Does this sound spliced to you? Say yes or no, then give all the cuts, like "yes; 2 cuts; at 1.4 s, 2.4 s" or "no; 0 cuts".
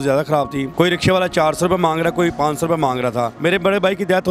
yes; 2 cuts; at 0.7 s, 3.3 s